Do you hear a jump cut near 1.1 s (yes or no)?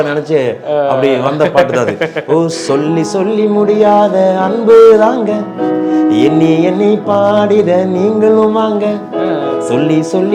no